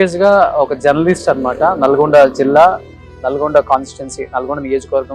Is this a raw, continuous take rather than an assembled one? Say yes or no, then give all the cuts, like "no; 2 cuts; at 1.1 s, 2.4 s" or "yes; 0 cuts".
yes; 0 cuts